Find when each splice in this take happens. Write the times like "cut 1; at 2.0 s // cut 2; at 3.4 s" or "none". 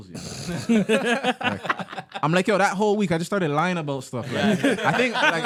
none